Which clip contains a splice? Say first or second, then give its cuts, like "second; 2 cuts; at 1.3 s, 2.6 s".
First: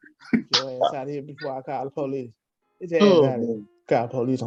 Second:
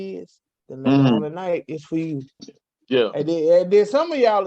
second; 1 cut; at 2.5 s